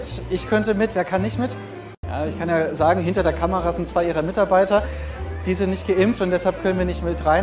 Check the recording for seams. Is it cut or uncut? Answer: cut